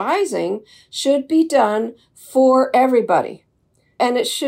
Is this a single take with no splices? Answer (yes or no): yes